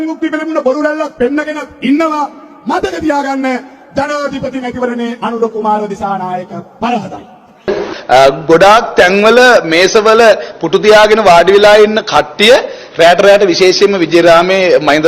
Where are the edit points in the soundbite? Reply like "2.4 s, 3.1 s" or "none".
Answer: 7.7 s